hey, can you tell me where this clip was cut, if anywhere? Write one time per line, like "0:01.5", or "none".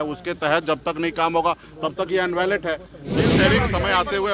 0:03.3